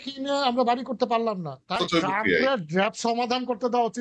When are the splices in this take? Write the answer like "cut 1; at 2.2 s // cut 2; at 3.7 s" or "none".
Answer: cut 1; at 1.7 s